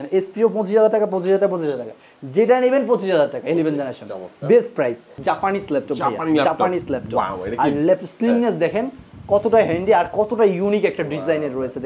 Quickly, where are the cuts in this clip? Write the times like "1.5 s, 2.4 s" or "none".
5.1 s